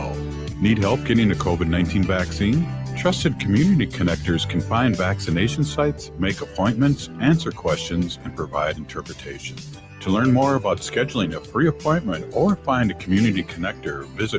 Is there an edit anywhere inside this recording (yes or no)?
no